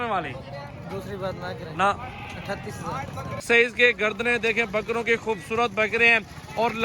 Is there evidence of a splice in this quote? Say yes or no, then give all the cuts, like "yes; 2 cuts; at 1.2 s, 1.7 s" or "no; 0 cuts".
yes; 1 cut; at 3.4 s